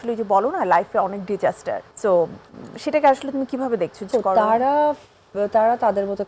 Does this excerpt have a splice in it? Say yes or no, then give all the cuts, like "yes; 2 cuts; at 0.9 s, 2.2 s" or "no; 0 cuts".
yes; 2 cuts; at 1.9 s, 4.1 s